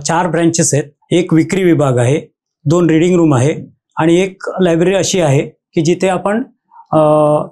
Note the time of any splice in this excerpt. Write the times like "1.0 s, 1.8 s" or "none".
0.9 s